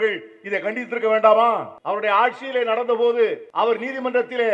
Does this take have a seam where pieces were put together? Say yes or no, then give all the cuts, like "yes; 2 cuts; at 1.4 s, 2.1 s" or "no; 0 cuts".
yes; 2 cuts; at 1.7 s, 3.4 s